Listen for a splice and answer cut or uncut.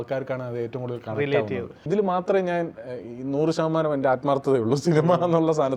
cut